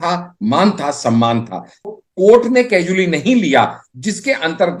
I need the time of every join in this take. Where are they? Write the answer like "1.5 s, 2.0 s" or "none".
1.9 s